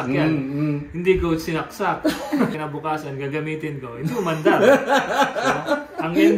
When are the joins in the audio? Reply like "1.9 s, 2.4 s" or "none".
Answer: 2.5 s